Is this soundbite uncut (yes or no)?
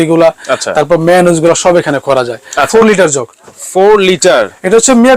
no